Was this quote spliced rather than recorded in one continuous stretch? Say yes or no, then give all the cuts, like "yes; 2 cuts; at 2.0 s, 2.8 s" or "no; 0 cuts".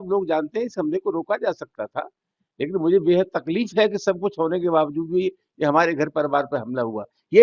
no; 0 cuts